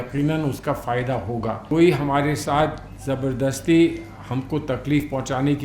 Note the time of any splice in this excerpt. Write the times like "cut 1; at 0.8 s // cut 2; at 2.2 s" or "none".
cut 1; at 1.6 s